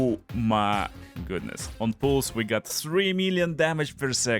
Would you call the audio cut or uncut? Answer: cut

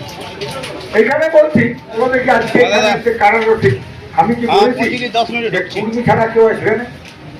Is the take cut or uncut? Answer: cut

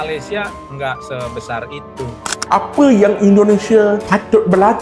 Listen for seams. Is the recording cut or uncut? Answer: cut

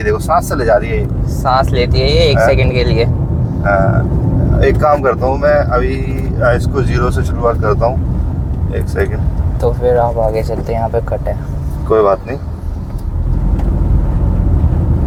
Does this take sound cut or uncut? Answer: uncut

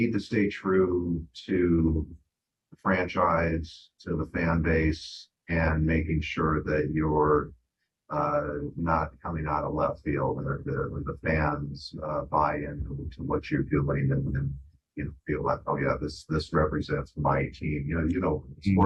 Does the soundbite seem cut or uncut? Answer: uncut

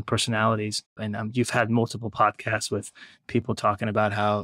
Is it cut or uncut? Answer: cut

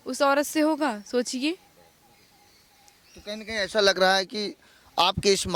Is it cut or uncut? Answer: uncut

